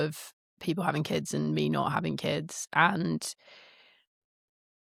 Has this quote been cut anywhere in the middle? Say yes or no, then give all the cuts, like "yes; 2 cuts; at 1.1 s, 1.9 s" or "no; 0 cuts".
no; 0 cuts